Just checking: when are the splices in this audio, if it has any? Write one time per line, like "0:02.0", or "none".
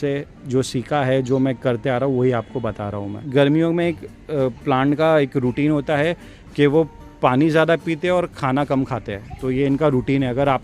0:03.2

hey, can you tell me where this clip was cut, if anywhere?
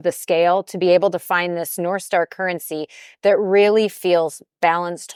none

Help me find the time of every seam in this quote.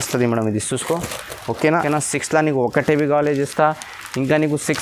0:01.8

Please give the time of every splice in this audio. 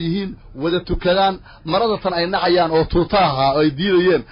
none

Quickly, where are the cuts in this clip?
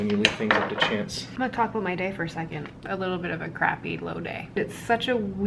0:01.3
0:02.7
0:04.6

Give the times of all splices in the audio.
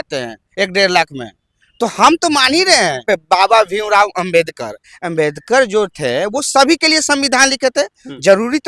none

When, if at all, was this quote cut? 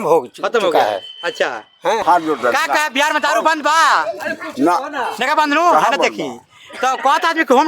0:02.0

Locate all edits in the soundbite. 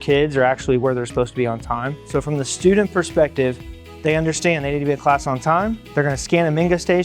0:02.0
0:05.8

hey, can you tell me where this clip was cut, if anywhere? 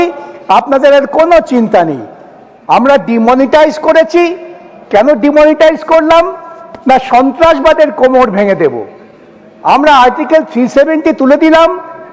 none

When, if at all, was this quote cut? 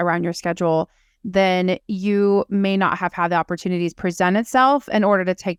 none

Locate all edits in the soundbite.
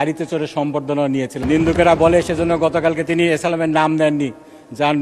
0:01.4

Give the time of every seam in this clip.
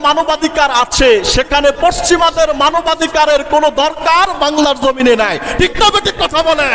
none

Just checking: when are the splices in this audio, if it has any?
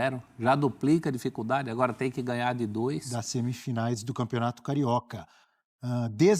0:03.1

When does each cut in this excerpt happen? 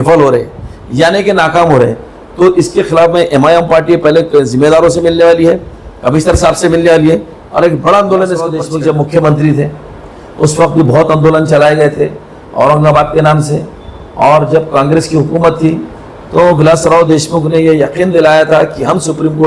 0:08.6

